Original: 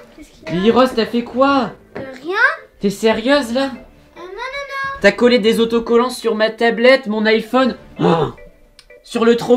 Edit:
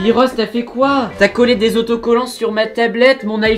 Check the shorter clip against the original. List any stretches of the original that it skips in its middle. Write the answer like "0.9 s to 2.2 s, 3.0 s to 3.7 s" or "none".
1.7 s to 4.9 s